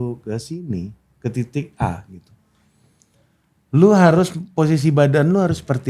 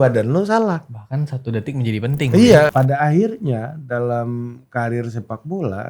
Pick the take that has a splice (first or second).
second